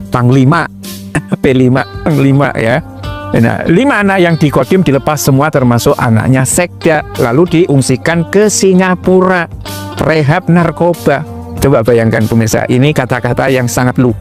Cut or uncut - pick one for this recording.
uncut